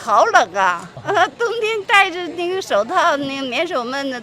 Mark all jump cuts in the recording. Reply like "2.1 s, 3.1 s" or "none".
0.9 s